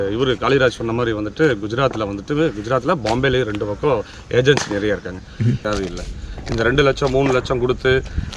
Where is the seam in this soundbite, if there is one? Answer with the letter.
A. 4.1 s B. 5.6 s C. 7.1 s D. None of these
B